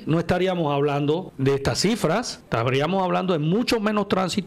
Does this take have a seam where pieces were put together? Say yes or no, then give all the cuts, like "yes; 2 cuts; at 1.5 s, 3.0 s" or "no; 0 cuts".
yes; 2 cuts; at 1.3 s, 2.4 s